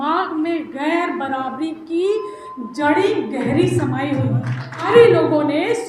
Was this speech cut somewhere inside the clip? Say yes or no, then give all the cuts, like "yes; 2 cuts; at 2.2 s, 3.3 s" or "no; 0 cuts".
yes; 1 cut; at 4.9 s